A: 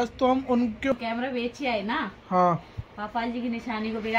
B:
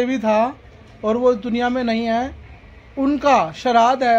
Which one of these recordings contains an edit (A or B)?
A